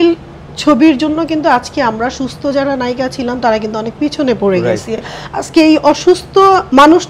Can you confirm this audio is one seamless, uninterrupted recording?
yes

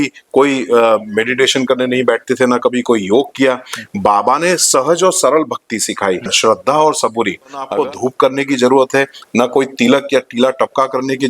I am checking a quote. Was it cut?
yes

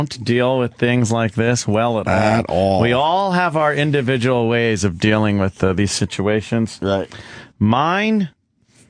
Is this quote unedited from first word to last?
yes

